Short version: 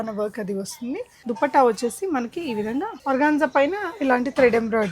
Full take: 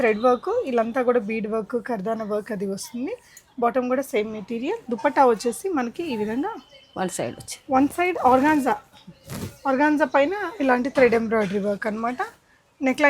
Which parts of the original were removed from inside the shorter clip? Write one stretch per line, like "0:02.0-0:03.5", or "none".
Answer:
0:03.3-0:04.8
0:06.6-0:09.5